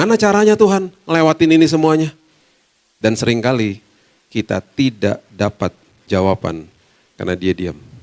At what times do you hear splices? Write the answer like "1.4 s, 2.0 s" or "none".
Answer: 5.0 s